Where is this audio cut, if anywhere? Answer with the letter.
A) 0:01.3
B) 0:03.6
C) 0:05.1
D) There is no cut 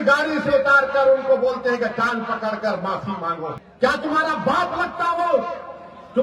B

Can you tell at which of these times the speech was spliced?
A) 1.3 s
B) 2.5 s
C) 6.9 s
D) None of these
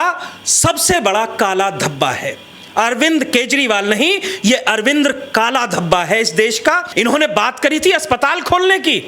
C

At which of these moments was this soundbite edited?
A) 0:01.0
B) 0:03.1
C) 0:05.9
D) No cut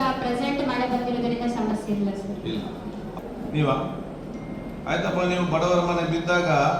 B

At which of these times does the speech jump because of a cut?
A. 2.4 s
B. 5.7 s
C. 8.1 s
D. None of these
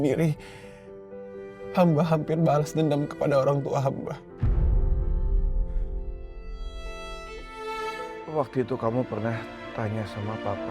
C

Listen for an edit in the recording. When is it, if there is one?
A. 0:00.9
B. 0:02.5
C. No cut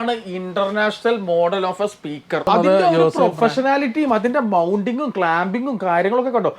B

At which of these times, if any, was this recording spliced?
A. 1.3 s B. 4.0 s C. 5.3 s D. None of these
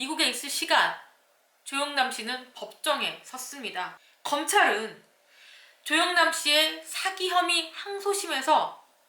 B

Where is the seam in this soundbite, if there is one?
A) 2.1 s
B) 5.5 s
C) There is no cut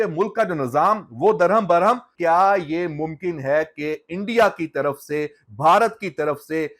A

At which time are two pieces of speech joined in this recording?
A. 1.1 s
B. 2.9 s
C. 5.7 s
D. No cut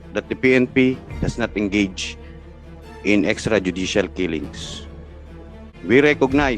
C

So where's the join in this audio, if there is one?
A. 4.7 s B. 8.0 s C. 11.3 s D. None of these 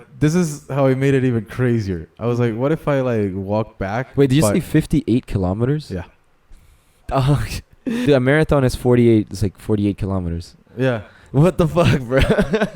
B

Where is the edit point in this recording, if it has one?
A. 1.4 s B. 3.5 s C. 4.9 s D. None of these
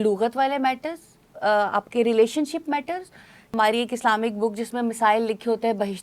B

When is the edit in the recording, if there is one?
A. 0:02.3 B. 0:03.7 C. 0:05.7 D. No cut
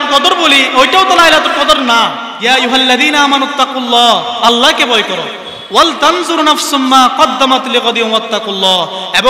A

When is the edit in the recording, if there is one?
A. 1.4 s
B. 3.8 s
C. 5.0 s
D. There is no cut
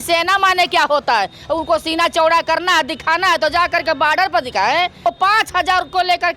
C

